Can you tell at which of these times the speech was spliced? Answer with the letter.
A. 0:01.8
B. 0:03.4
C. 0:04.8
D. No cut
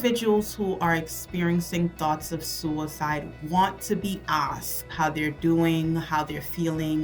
C